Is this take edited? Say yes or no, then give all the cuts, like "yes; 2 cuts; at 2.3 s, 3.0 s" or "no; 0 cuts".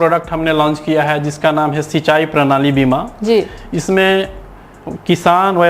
no; 0 cuts